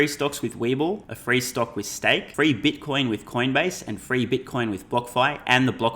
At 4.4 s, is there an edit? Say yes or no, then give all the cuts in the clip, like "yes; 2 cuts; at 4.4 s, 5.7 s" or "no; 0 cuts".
no; 2 cuts; at 1.1 s, 2.3 s